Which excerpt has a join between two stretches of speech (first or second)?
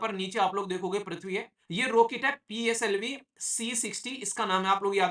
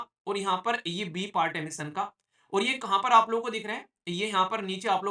first